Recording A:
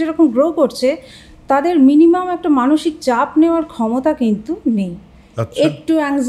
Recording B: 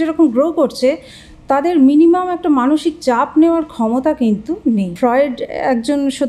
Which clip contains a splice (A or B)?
B